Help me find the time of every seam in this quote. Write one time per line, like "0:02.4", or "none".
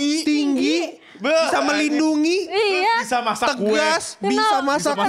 none